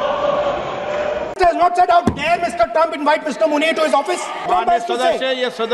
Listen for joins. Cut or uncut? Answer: cut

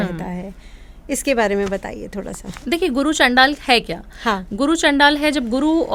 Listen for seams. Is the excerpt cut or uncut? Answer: uncut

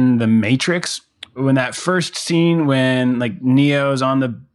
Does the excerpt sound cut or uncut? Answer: cut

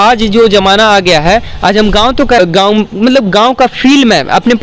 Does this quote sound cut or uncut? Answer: cut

